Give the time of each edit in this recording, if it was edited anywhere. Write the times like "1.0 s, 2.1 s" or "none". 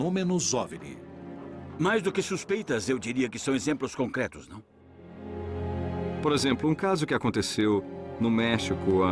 1.4 s